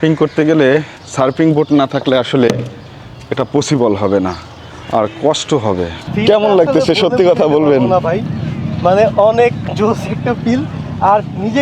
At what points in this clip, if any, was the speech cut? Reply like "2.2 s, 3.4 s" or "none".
6.1 s